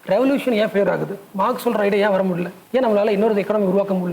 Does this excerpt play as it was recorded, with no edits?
no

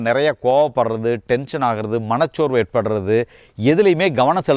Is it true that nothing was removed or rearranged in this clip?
yes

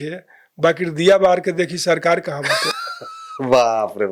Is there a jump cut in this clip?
no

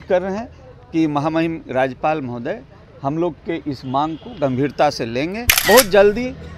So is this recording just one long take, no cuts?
no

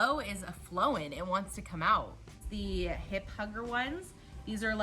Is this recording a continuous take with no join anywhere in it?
no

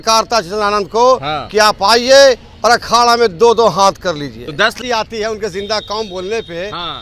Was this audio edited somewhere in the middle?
yes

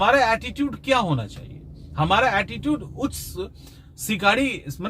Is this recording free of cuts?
yes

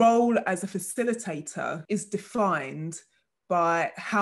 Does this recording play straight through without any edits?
no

